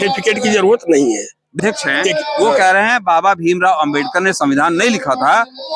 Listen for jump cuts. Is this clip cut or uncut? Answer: cut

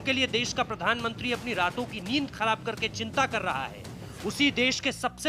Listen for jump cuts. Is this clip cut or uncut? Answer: cut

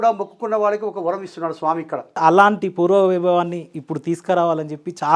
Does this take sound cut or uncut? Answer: cut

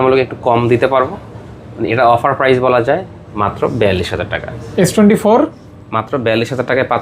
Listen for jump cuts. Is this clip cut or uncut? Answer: cut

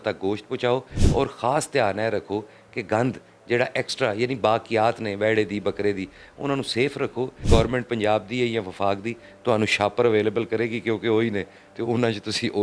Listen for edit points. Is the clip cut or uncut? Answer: cut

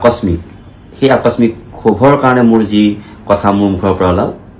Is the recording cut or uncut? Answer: uncut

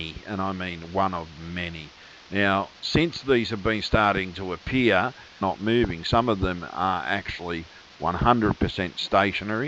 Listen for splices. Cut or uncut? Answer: uncut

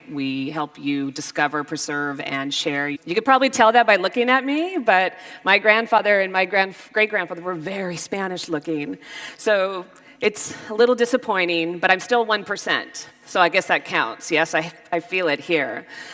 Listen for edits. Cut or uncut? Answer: uncut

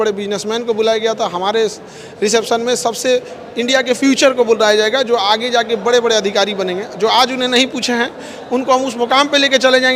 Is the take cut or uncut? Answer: uncut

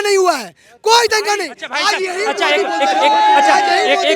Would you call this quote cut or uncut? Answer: uncut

